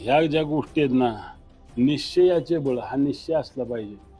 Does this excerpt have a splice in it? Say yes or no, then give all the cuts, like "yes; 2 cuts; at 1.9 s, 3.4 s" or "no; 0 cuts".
no; 0 cuts